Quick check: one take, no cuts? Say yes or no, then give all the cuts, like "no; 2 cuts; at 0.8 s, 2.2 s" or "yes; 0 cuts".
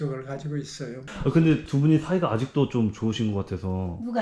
yes; 0 cuts